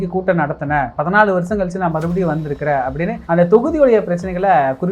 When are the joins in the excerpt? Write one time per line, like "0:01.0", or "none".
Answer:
none